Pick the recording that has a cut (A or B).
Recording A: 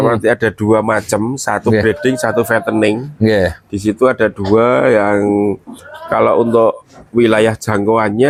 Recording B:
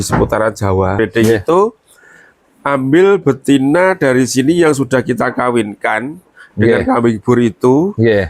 B